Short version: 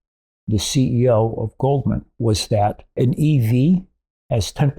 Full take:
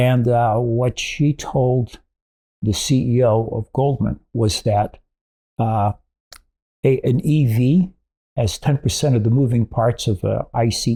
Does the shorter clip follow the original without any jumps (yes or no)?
no